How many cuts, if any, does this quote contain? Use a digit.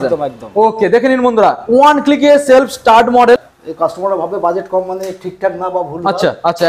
1